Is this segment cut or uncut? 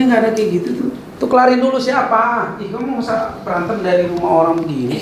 cut